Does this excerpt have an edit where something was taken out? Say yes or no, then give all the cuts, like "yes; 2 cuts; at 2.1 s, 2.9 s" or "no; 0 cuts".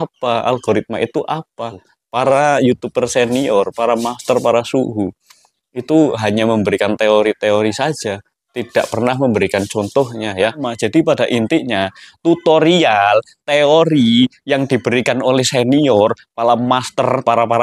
yes; 2 cuts; at 1.9 s, 10.7 s